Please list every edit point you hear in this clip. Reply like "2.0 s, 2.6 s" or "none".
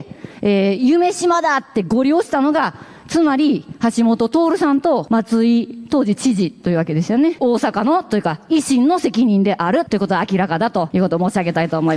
5.0 s, 7.4 s, 9.9 s, 10.9 s